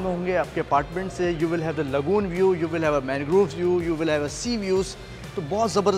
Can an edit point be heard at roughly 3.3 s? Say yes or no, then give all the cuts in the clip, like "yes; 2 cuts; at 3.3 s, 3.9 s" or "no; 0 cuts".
no; 0 cuts